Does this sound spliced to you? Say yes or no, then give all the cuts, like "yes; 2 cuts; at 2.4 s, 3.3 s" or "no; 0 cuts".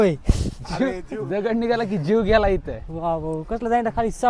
no; 0 cuts